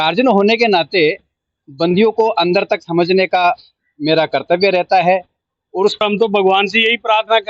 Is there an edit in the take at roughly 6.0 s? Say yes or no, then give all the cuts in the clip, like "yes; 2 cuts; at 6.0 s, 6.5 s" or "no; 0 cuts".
yes; 1 cut; at 6.0 s